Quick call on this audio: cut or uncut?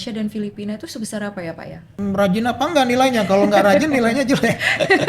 cut